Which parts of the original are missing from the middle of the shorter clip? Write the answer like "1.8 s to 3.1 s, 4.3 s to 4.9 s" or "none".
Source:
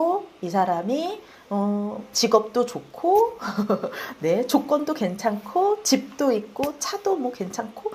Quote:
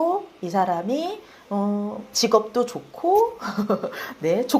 none